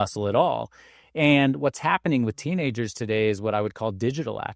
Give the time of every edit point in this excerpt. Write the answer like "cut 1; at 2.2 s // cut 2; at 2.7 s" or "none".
none